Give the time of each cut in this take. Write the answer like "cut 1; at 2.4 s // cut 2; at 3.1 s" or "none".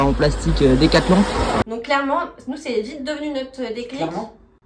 cut 1; at 1.6 s